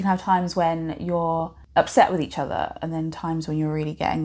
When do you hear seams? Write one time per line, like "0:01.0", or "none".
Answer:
0:01.6